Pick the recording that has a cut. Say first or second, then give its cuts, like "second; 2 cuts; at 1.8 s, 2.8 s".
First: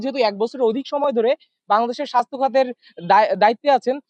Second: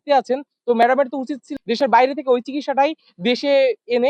second; 1 cut; at 1.5 s